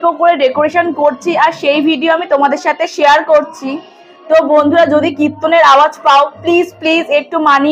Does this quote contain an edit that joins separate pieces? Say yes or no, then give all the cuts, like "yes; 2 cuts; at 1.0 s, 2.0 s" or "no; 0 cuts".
no; 0 cuts